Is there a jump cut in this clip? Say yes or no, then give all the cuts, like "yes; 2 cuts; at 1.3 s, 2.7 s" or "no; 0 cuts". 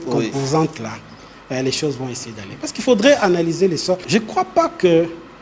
yes; 1 cut; at 4.0 s